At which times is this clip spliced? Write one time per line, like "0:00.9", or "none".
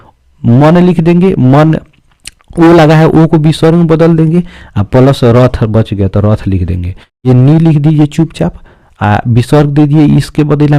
0:07.3